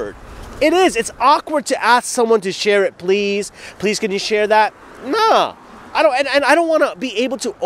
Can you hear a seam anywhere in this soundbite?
no; 0 cuts

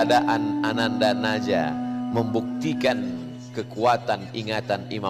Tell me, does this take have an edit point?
no; 0 cuts

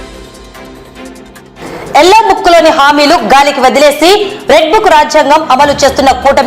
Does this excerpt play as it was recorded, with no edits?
yes; 0 cuts

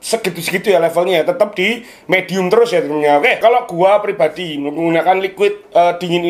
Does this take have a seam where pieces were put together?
yes; 1 cut; at 3.4 s

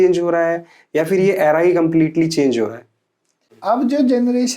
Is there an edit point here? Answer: yes; 1 cut; at 3.5 s

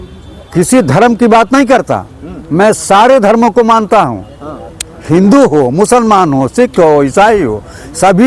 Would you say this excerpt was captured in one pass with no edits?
yes; 0 cuts

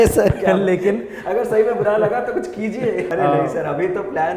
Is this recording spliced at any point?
yes; 1 cut; at 3.1 s

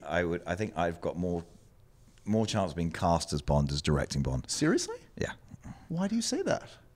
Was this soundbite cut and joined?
no; 0 cuts

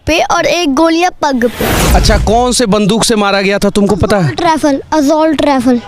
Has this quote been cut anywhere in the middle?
yes; 1 cut; at 1.8 s

